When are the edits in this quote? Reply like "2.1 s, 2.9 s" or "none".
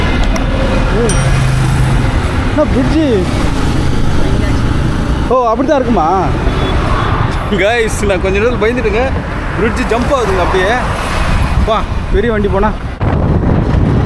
13.0 s